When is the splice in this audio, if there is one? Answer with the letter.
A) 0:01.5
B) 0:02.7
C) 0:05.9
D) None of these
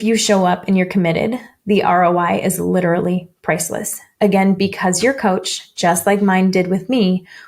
D